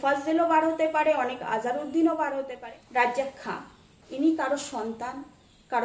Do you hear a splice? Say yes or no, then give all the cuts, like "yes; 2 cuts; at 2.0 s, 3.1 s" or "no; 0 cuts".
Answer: yes; 1 cut; at 2.5 s